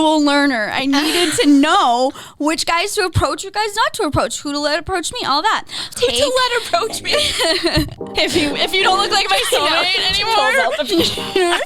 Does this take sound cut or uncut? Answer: cut